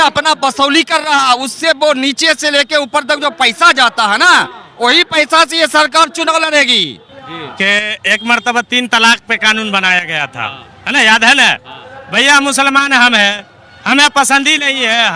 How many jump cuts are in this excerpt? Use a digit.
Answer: 1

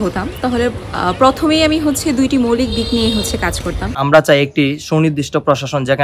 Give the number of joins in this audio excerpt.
1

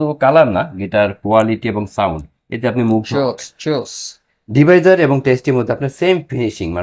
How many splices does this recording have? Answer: 1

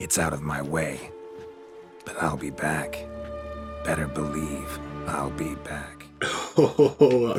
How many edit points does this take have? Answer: 0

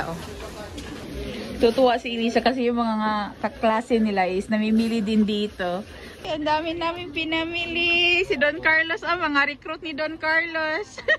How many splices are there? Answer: 2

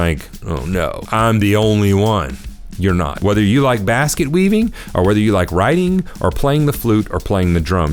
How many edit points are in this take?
2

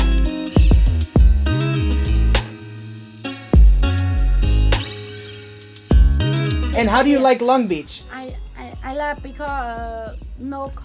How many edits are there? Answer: 1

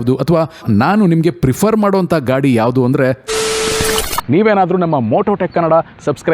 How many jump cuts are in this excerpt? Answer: 1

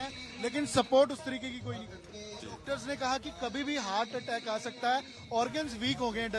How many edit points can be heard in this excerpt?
1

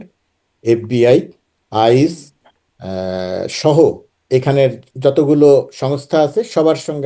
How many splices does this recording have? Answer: 0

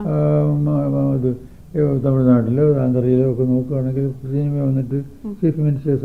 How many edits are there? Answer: 0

